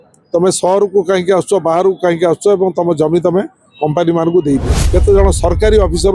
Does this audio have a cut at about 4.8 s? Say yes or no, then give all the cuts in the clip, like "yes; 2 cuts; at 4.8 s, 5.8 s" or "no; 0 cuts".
yes; 1 cut; at 4.8 s